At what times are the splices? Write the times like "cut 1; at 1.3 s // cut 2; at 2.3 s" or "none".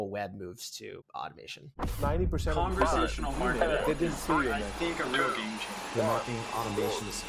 cut 1; at 1.2 s